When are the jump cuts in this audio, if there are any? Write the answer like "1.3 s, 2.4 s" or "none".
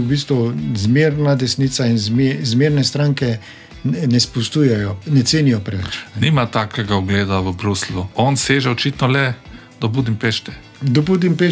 8.1 s